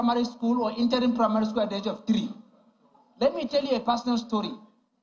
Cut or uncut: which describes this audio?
uncut